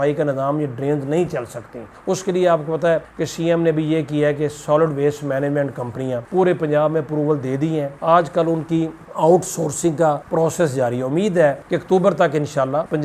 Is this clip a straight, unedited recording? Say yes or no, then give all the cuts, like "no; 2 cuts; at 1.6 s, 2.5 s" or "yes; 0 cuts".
yes; 0 cuts